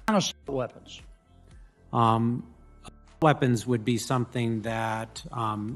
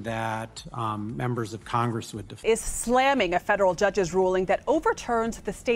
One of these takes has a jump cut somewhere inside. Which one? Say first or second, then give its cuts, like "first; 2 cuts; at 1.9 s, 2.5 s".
second; 1 cut; at 2.2 s